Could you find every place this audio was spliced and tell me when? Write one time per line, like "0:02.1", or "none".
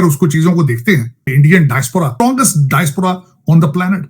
0:01.1
0:02.1